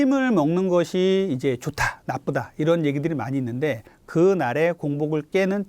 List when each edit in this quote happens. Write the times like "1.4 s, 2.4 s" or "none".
3.9 s